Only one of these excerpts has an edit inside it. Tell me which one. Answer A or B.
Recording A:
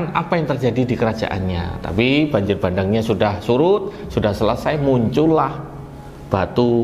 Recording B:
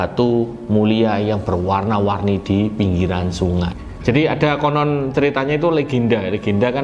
B